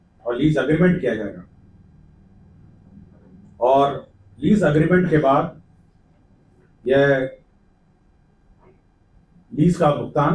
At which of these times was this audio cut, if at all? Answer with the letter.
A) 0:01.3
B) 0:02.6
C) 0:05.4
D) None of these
D